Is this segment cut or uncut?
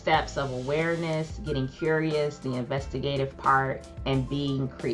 cut